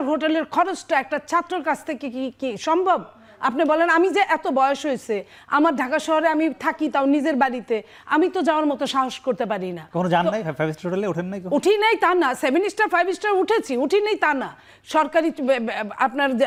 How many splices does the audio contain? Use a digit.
0